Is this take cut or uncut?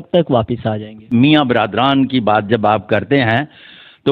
cut